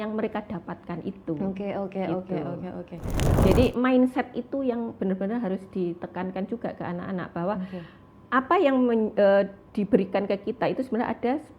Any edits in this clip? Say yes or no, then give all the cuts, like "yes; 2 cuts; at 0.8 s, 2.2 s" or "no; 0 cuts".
yes; 1 cut; at 3.4 s